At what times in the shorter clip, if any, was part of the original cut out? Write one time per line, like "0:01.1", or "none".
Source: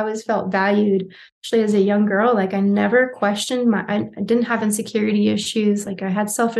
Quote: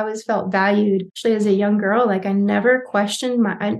0:01.1